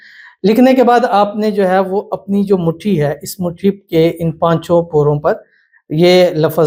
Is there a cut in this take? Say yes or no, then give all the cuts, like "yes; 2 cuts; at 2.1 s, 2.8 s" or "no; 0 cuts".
no; 0 cuts